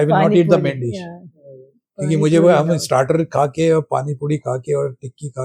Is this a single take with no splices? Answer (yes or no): yes